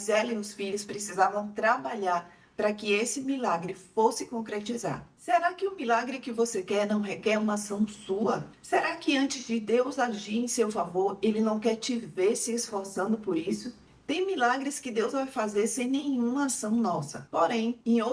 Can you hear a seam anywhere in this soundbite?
no; 0 cuts

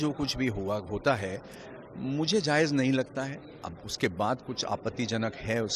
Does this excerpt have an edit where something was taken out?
no; 0 cuts

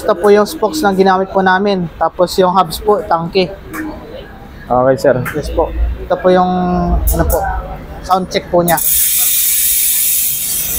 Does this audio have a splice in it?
no; 0 cuts

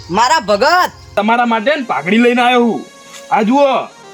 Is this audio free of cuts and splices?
no; 1 cut; at 1.1 s

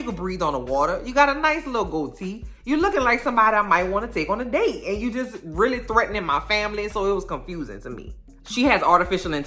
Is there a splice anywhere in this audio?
yes; 1 cut; at 8.3 s

